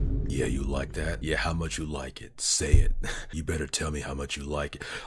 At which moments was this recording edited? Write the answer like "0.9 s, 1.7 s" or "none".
none